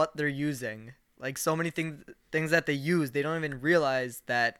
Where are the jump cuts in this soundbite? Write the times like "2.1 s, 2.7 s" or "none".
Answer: none